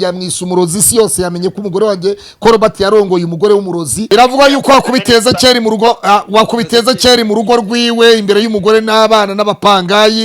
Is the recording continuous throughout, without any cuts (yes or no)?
no